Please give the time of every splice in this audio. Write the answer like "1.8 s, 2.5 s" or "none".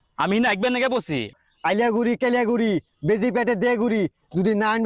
1.3 s